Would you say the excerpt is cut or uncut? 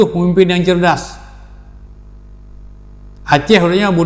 uncut